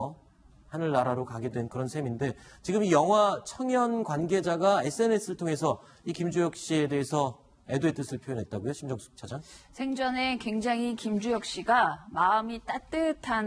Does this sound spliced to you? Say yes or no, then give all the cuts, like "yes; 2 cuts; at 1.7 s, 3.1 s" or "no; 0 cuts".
no; 0 cuts